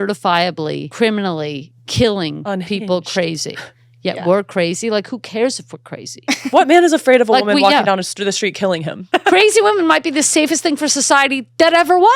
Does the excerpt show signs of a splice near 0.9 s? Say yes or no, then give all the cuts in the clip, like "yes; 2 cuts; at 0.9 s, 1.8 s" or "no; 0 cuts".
yes; 2 cuts; at 0.9 s, 8.9 s